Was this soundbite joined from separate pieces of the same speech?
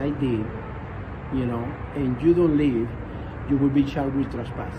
no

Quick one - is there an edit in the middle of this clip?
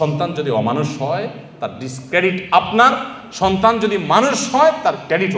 no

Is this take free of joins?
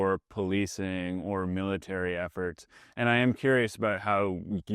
yes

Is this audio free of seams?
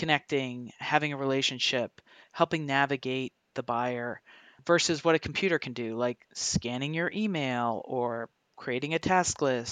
yes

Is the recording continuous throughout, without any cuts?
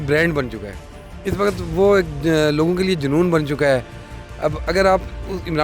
yes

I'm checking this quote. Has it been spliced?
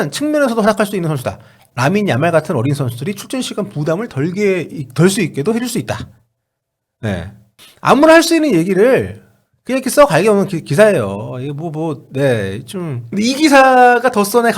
yes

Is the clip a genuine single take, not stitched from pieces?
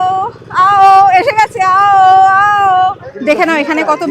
no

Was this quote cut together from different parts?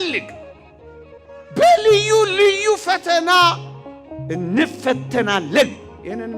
no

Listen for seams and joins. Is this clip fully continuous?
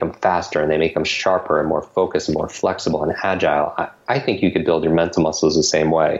yes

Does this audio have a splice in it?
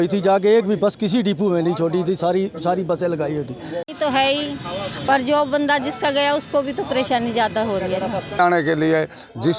yes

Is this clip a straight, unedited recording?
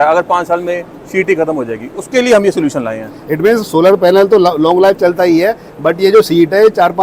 yes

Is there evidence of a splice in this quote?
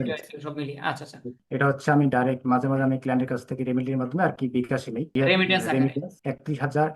yes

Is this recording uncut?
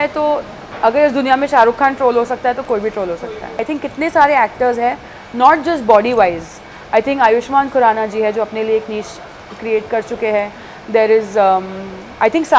no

